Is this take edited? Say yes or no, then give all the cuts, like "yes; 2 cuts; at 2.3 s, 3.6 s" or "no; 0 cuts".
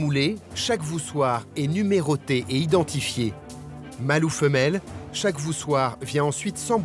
no; 0 cuts